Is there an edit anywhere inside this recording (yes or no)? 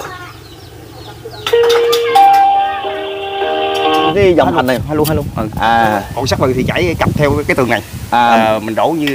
yes